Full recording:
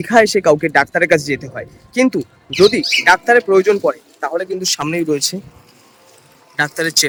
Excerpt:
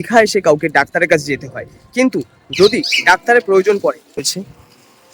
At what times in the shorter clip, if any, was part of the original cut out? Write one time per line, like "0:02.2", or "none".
0:04.2